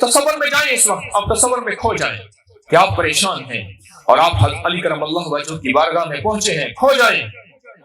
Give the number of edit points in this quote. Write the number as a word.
zero